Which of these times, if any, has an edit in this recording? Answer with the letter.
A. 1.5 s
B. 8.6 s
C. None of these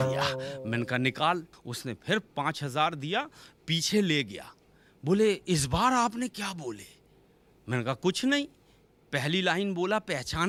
C